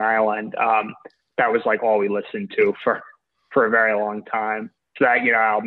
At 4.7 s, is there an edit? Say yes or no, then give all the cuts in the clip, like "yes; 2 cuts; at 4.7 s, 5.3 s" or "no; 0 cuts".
yes; 1 cut; at 4.7 s